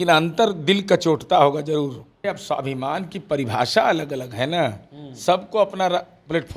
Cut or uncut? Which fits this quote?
cut